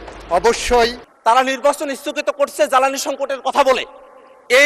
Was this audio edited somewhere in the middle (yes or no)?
yes